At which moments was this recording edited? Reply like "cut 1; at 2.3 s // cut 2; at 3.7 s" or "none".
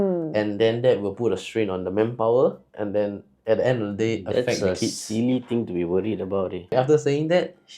cut 1; at 6.7 s